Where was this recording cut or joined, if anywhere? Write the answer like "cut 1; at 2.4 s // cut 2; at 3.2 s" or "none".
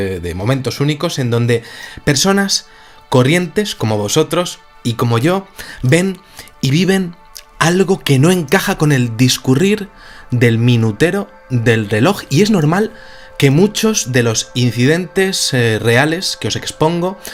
none

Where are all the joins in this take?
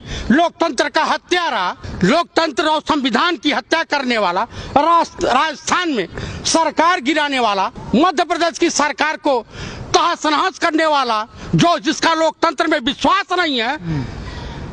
cut 1; at 1.8 s // cut 2; at 7.8 s

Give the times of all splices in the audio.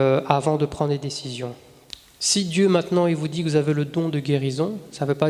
cut 1; at 1.7 s

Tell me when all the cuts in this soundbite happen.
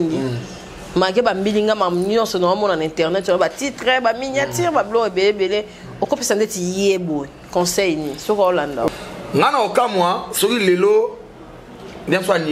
cut 1; at 8.9 s

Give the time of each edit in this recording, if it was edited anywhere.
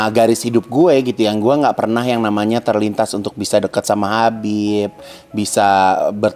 none

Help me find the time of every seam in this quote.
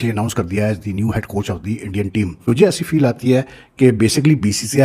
cut 1; at 2.4 s

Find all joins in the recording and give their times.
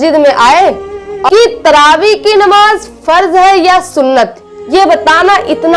cut 1; at 1.2 s

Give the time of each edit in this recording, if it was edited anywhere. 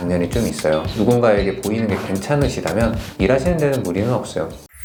none

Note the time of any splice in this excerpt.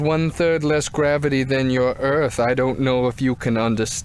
cut 1; at 1.8 s

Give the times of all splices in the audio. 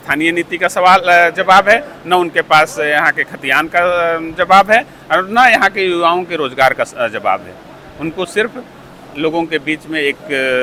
none

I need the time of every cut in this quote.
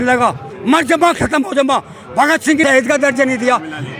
cut 1; at 2.6 s

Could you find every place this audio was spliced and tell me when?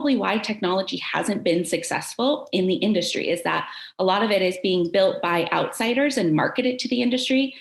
none

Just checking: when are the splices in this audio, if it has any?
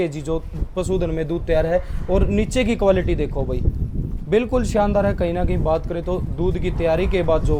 none

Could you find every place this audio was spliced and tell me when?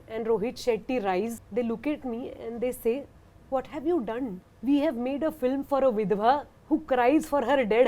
cut 1; at 1.4 s // cut 2; at 4.5 s // cut 3; at 6.5 s

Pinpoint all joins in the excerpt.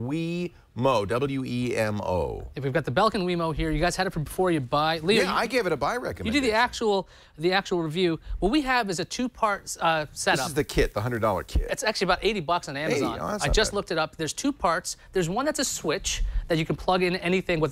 none

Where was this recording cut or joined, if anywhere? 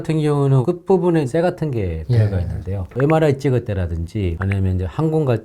cut 1; at 1.3 s // cut 2; at 2.9 s

